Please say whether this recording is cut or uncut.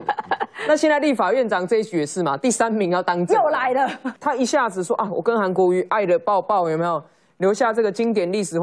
cut